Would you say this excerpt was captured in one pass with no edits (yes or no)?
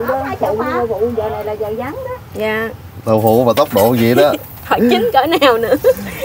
no